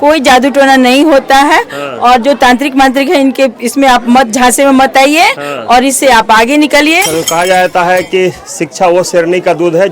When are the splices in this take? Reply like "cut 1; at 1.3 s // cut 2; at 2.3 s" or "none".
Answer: cut 1; at 7.1 s